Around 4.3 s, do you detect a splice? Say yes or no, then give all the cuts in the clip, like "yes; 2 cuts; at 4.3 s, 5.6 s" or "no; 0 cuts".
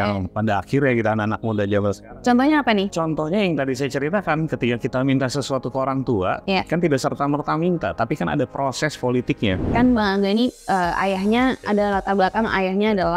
no; 3 cuts; at 2.9 s, 6.4 s, 9.6 s